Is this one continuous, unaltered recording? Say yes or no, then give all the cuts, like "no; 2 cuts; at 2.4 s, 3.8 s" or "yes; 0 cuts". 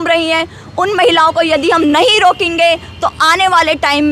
yes; 0 cuts